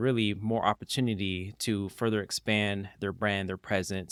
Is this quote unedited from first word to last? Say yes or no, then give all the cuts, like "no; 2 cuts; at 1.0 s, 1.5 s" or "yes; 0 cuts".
yes; 0 cuts